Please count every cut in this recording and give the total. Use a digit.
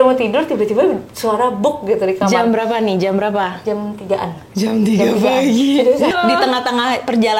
1